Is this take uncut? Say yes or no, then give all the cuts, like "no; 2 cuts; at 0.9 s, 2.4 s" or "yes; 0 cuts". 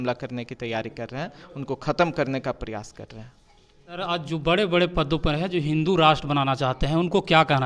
no; 1 cut; at 4.0 s